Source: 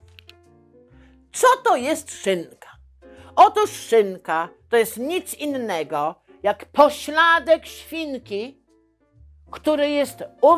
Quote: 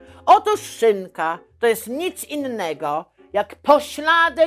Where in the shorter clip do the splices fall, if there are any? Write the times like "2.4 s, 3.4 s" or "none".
none

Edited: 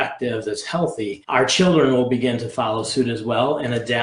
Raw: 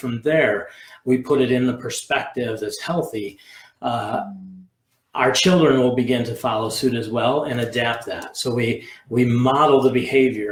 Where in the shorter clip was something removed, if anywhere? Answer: 1.2 s

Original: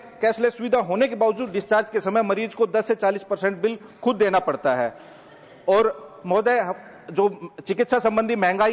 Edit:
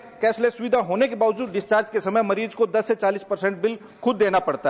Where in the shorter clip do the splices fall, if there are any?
none

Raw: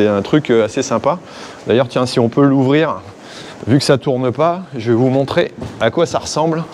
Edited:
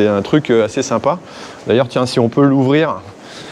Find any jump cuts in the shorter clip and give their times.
none

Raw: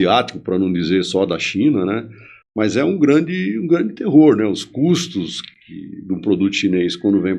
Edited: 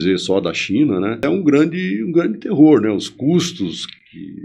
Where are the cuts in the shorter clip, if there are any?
1.2 s

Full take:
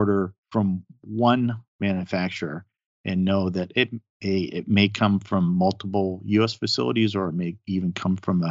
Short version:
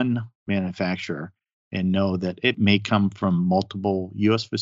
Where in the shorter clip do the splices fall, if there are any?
2.6 s

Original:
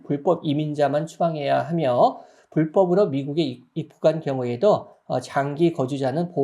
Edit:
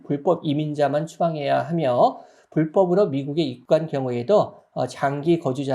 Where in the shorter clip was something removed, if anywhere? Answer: 3.6 s

